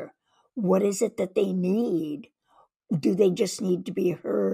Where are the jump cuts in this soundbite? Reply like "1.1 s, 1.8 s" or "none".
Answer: none